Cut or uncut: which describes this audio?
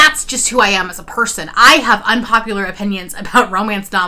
uncut